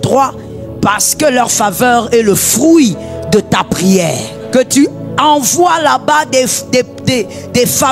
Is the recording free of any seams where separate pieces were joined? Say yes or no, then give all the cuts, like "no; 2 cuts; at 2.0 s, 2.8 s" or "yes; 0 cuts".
no; 1 cut; at 4.3 s